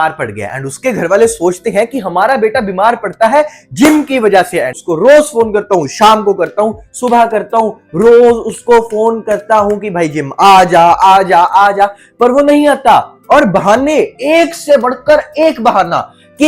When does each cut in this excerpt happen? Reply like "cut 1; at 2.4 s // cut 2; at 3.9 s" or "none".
cut 1; at 4.8 s